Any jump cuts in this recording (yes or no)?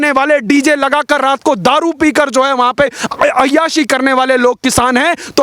no